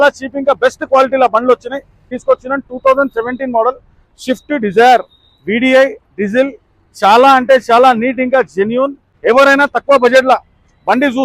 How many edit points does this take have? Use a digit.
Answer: 2